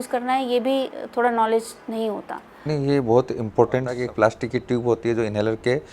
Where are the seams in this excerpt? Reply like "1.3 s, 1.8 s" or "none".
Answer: 4.0 s